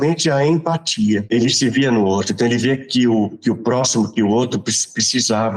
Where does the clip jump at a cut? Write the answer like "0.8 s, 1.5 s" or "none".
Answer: 1.3 s